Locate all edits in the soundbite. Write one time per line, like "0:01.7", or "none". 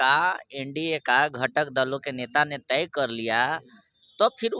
none